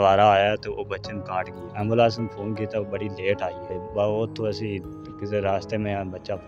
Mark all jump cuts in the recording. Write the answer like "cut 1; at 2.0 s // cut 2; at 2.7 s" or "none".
cut 1; at 1.6 s // cut 2; at 3.7 s